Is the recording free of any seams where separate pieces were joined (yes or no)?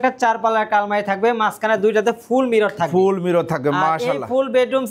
yes